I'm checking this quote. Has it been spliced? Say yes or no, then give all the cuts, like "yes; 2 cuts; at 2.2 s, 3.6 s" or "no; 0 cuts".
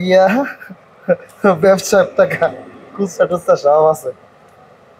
no; 0 cuts